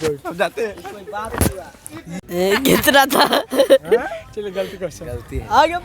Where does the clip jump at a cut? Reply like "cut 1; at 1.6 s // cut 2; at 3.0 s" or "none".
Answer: cut 1; at 2.2 s